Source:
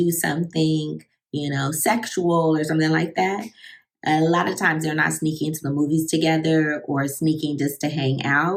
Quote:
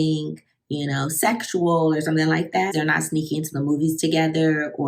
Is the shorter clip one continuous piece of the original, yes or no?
no